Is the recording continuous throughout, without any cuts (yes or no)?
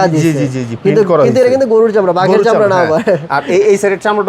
yes